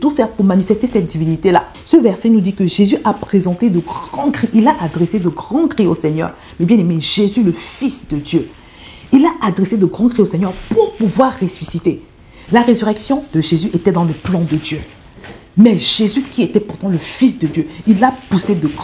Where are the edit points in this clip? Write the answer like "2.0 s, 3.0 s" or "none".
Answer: 1.8 s